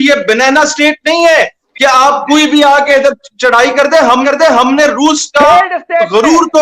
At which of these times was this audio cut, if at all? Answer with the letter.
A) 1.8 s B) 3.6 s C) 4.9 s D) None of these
D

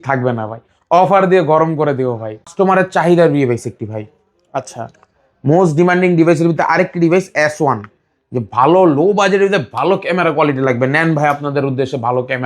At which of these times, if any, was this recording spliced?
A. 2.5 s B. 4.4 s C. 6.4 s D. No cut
A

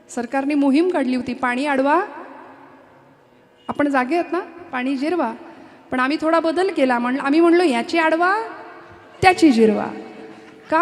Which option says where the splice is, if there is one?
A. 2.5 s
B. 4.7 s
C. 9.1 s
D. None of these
D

